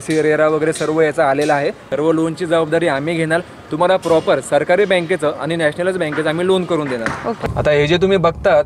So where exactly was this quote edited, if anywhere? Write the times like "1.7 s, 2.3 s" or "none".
1.8 s, 7.4 s